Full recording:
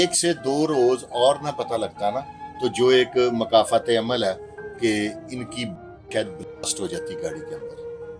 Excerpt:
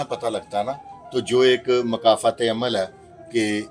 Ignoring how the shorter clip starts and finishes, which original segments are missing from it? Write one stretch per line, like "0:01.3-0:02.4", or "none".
none